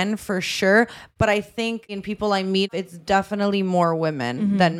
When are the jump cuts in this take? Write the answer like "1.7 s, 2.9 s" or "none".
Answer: none